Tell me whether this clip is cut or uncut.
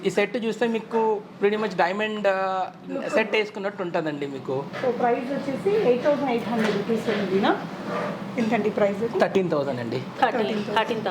uncut